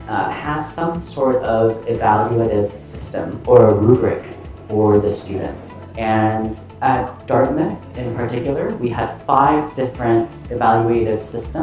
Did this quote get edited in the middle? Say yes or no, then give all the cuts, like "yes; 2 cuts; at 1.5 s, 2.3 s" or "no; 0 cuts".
no; 0 cuts